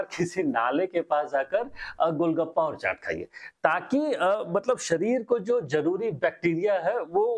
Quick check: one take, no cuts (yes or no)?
yes